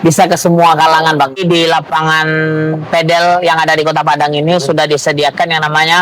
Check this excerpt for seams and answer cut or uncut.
cut